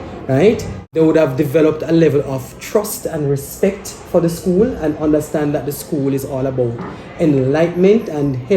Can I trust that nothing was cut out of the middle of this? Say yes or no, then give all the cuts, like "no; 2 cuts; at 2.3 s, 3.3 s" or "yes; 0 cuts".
no; 1 cut; at 0.9 s